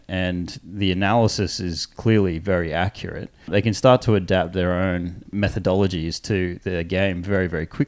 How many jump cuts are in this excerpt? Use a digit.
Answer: 3